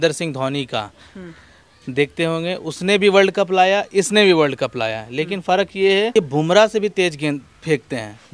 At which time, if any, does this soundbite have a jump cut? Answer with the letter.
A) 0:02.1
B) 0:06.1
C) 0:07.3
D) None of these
B